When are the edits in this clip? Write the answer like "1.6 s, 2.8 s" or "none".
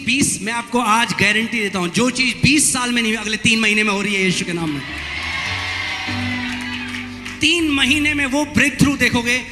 none